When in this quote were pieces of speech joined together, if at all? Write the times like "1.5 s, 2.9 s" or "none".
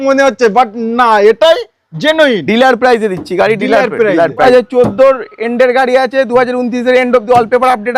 4.4 s